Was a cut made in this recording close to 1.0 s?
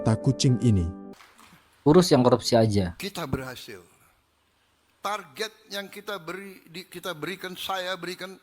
yes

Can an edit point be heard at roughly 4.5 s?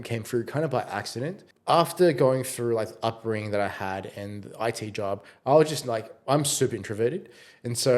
no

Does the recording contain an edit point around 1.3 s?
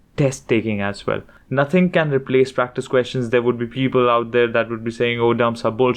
yes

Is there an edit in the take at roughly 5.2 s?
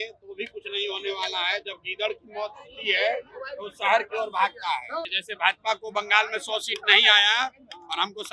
yes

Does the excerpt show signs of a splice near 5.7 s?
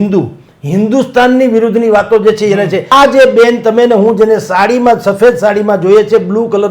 no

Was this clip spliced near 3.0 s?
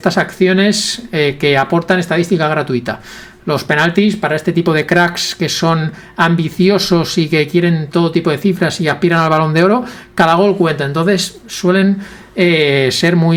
no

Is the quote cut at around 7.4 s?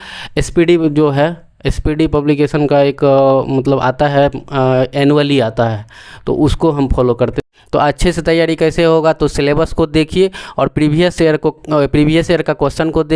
yes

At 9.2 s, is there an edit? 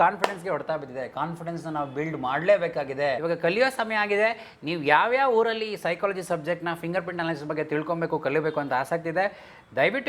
no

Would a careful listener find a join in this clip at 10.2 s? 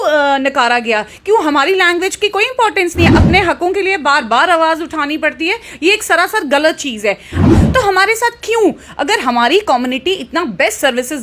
no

